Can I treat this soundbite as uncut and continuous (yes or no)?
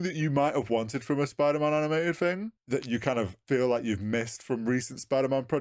no